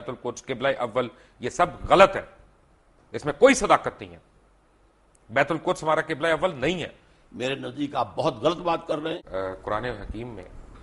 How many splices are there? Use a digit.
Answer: 1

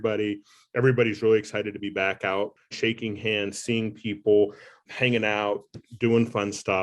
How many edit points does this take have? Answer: 2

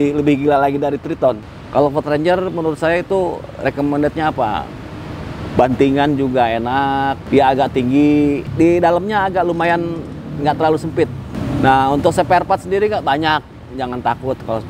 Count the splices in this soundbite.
4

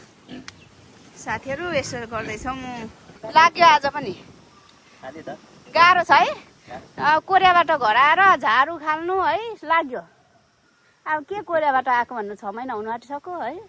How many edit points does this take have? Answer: 1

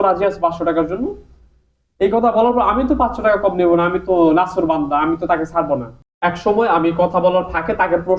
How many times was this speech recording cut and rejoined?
1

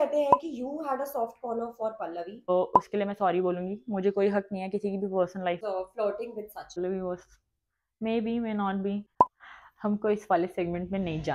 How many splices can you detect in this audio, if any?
4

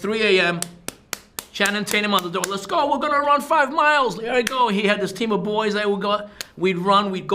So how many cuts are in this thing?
0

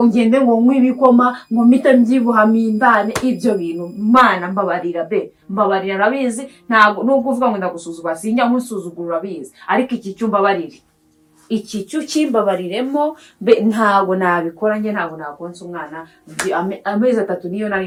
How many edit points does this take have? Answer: 0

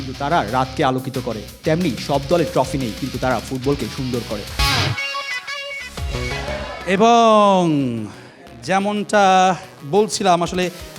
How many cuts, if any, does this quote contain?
1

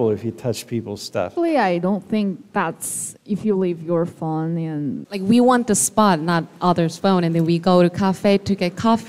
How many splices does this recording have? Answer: 2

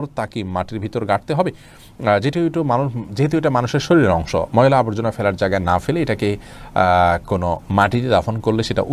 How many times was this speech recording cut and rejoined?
0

